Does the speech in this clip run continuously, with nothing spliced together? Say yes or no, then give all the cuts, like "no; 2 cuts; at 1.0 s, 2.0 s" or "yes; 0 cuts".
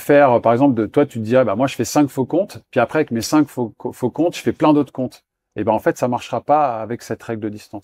yes; 0 cuts